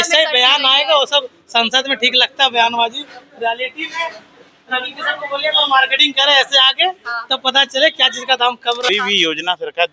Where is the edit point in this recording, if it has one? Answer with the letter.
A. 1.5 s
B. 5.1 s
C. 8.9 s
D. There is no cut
C